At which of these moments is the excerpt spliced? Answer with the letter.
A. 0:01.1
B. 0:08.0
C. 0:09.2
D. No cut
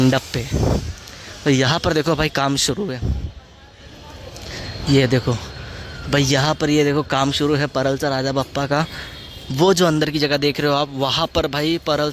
D